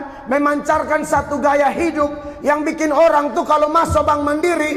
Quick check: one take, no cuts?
yes; 0 cuts

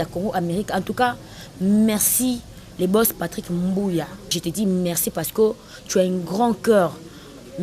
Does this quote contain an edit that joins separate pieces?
yes; 1 cut; at 4.4 s

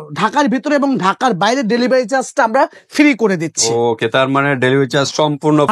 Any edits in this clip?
no; 0 cuts

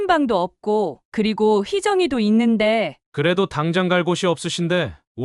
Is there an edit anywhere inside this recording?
yes; 1 cut; at 3.0 s

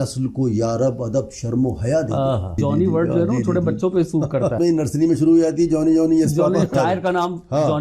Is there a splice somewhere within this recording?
yes; 3 cuts; at 2.6 s, 4.6 s, 6.7 s

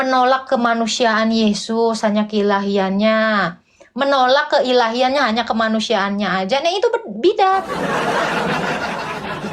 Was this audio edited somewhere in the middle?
yes; 1 cut; at 8.3 s

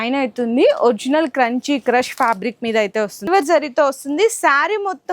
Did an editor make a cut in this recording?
yes; 1 cut; at 3.2 s

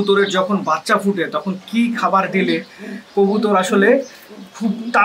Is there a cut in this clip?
no; 0 cuts

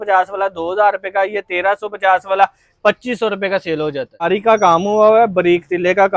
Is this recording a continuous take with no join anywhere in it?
no; 1 cut; at 4.3 s

